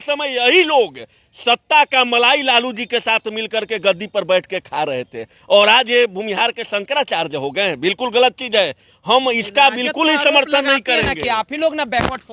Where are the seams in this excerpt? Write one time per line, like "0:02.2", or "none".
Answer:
none